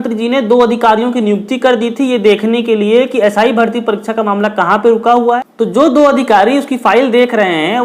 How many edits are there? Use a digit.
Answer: 1